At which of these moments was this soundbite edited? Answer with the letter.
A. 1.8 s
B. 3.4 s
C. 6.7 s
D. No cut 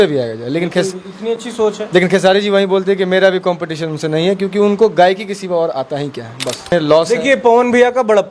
C